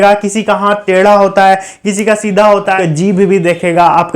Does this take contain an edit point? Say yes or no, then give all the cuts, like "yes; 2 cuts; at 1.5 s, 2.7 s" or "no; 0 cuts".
yes; 1 cut; at 2.8 s